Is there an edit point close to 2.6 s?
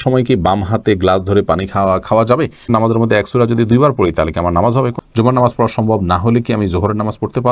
yes; 2 cuts; at 2.6 s, 5.0 s

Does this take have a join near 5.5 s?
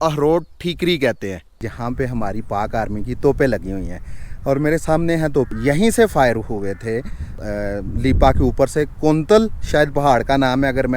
yes; 3 cuts; at 1.6 s, 5.5 s, 7.4 s

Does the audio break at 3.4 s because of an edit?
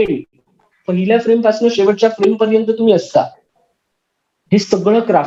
no; 0 cuts

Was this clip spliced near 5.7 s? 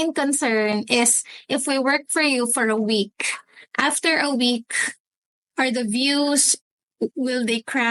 no; 0 cuts

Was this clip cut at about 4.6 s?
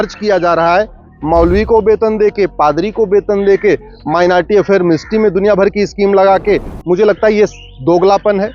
no; 1 cut; at 6.7 s

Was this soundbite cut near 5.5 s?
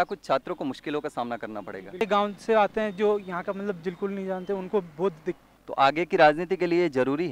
yes; 2 cuts; at 2.0 s, 5.5 s

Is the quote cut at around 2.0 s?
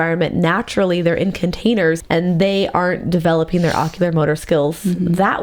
yes; 1 cut; at 2.0 s

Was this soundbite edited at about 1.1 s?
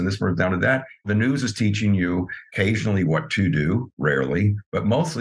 yes; 2 cuts; at 1.1 s, 2.4 s

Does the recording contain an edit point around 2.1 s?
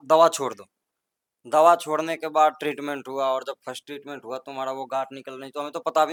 no; 0 cuts

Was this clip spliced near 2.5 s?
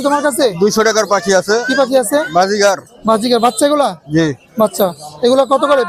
no; 0 cuts

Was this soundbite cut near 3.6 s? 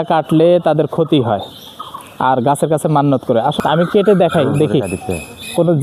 yes; 1 cut; at 3.6 s

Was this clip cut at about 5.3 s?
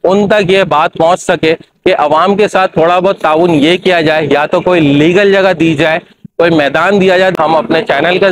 no; 1 cut; at 7.3 s

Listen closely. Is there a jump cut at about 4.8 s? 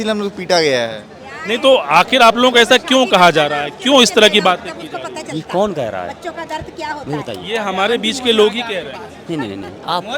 no; 0 cuts

